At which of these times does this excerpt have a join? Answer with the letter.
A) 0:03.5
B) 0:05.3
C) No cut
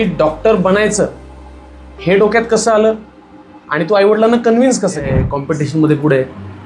B